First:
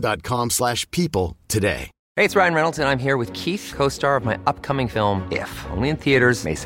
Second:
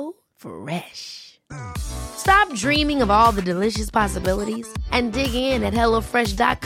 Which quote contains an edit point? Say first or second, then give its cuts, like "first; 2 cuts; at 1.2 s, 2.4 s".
first; 1 cut; at 1.9 s